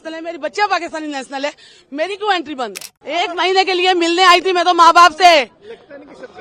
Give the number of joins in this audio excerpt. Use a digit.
1